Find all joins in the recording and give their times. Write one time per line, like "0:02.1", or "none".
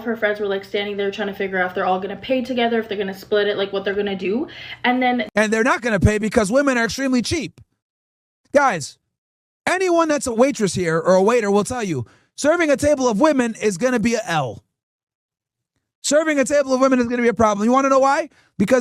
none